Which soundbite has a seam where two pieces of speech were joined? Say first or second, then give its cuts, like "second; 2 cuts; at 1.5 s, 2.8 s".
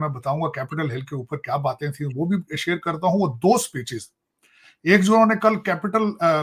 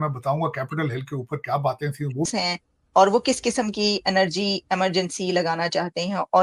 second; 1 cut; at 2.3 s